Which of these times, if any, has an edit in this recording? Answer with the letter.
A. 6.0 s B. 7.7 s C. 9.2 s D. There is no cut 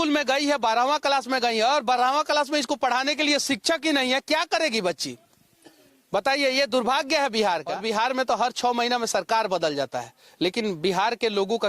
B